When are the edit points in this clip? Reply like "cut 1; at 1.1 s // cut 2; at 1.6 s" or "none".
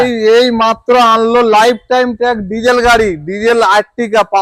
none